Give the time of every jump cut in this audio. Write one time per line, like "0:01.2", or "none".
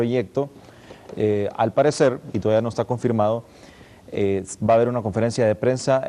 0:04.1